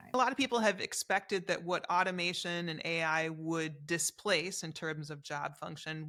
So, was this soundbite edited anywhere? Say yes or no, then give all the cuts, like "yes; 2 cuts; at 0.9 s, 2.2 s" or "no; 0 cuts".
no; 0 cuts